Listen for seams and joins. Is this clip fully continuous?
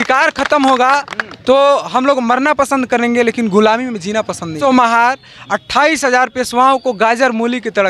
no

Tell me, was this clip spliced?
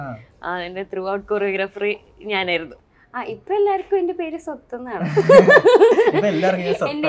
yes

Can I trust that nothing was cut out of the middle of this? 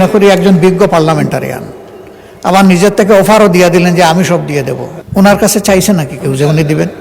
no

